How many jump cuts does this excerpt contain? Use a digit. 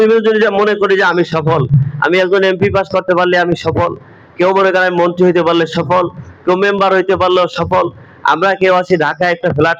0